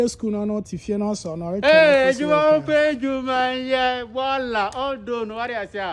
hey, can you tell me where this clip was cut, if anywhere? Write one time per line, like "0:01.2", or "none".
none